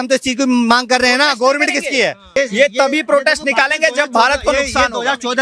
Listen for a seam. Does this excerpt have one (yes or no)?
yes